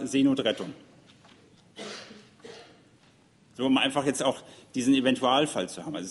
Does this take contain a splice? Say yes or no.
no